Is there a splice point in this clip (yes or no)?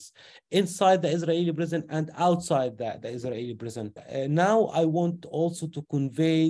yes